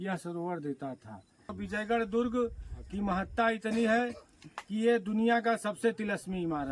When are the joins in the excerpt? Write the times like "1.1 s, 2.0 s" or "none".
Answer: 1.6 s